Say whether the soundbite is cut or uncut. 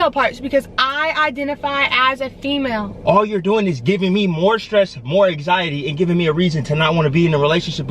cut